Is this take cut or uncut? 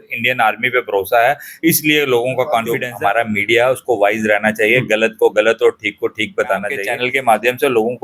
cut